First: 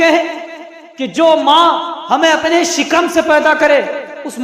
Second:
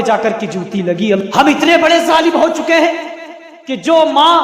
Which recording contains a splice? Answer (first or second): second